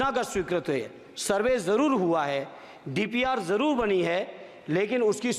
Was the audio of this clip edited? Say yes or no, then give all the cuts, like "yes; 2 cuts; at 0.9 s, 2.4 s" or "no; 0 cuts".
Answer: no; 0 cuts